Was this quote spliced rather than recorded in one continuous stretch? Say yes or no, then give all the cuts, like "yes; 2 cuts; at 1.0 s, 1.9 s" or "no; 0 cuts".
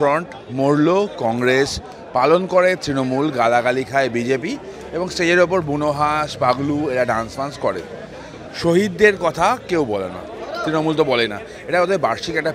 no; 0 cuts